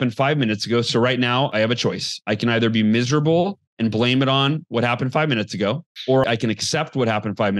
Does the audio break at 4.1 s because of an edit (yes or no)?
no